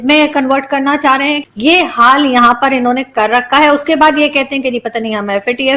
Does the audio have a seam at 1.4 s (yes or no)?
yes